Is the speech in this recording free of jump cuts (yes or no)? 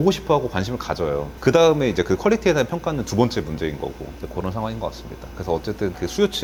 yes